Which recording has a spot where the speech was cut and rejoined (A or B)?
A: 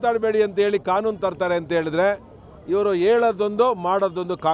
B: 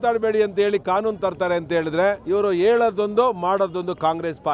B